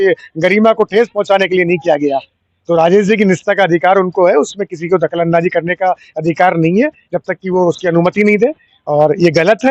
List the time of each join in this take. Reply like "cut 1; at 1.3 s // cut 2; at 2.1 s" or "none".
none